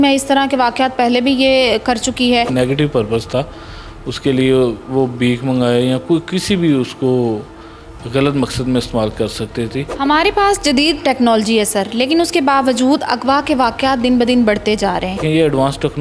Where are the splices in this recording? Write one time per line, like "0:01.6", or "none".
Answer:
0:02.5
0:09.9
0:15.2